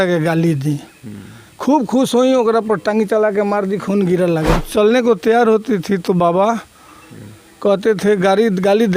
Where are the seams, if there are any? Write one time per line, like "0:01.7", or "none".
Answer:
0:04.6